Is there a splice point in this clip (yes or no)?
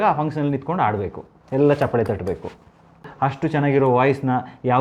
yes